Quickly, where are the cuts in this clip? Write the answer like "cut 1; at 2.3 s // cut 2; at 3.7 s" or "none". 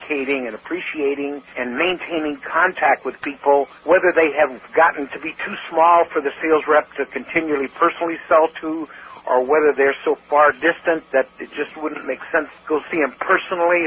cut 1; at 1.5 s // cut 2; at 3.8 s // cut 3; at 4.6 s // cut 4; at 12.5 s